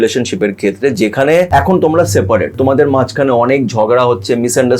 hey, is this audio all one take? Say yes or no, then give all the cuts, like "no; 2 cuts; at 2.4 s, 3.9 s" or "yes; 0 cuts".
no; 2 cuts; at 1.5 s, 2.5 s